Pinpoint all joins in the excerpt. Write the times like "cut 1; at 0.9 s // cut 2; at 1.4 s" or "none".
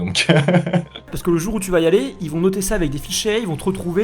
cut 1; at 1.1 s